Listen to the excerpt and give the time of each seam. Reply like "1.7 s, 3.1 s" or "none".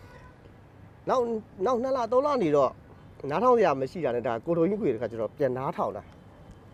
none